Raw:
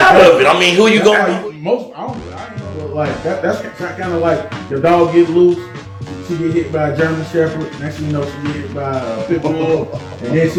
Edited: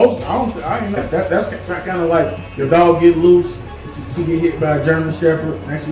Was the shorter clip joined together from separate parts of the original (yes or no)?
yes